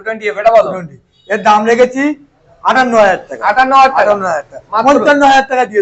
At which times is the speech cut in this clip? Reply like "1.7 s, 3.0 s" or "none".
none